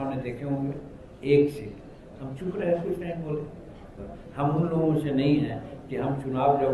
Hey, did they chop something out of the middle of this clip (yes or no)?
yes